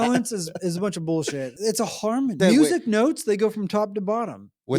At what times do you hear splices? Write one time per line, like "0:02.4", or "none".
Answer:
0:01.5
0:02.4